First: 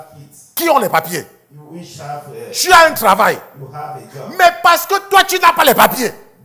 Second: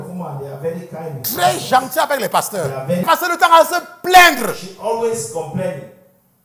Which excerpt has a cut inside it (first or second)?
second